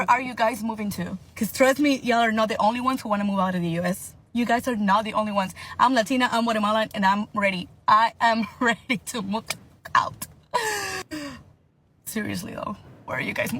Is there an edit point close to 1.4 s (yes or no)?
no